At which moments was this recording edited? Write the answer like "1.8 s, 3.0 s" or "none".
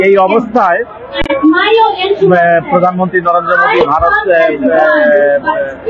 none